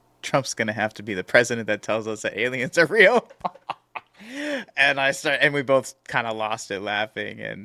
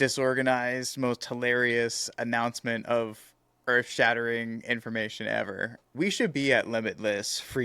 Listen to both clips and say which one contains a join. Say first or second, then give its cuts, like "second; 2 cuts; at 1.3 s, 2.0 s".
second; 1 cut; at 5.8 s